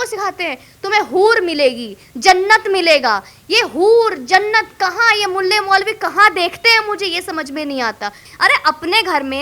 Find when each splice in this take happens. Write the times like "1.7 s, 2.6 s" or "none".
8.2 s

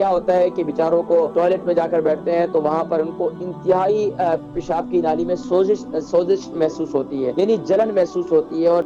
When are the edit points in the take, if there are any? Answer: 1.3 s, 7.3 s

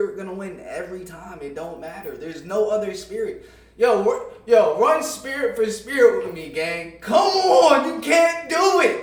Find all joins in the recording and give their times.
none

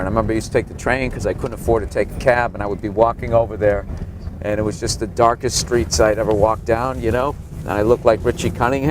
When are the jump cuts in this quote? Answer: 2.6 s

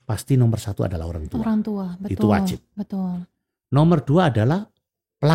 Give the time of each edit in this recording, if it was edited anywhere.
none

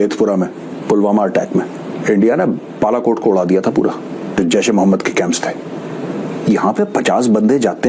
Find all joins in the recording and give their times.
1.9 s, 4.3 s

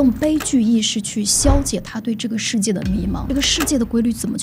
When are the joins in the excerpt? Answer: 3.2 s

